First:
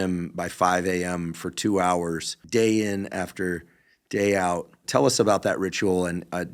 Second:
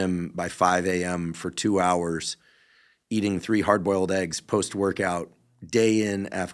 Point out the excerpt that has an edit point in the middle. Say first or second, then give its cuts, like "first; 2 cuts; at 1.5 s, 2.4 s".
first; 2 cuts; at 2.3 s, 4.8 s